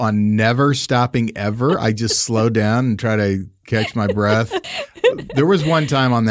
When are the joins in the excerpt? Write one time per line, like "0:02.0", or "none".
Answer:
0:04.6